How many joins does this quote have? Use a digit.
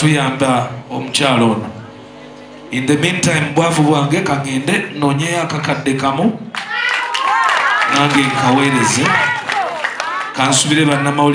0